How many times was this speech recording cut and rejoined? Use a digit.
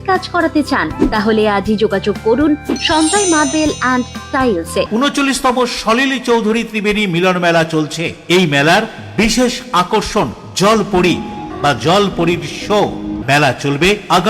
3